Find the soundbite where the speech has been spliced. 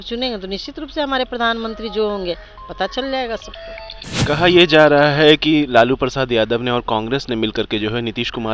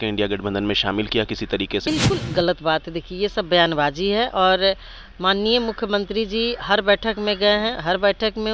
second; 1 cut; at 1.9 s

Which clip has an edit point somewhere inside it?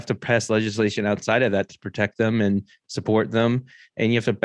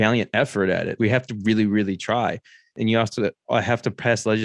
second; 2 cuts; at 0.9 s, 2.6 s

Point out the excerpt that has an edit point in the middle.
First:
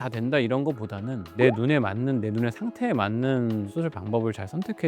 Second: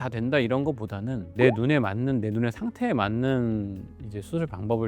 first; 1 cut; at 3.7 s

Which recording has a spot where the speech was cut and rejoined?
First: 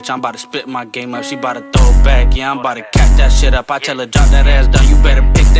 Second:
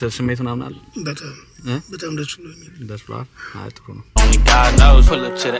second; 1 cut; at 4.0 s

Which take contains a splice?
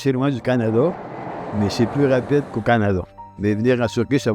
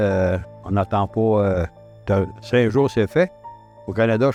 first; 1 cut; at 3.2 s

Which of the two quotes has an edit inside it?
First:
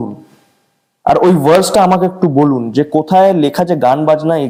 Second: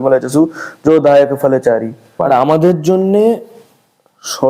second; 1 cut; at 2.2 s

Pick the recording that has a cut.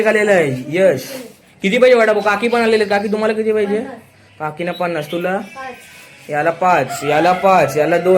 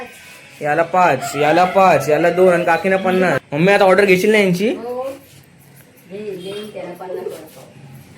second; 1 cut; at 3.4 s

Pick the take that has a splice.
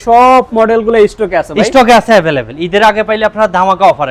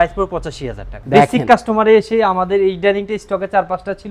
second; 1 cut; at 0.9 s

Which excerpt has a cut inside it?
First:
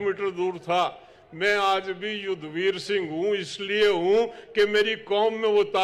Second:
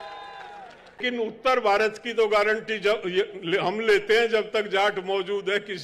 second; 1 cut; at 1.0 s

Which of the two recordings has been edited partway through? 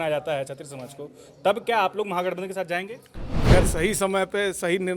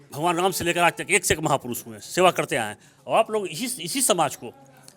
first; 1 cut; at 3.3 s

